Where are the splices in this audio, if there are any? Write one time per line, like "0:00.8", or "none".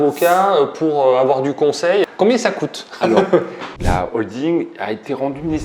0:02.0
0:03.7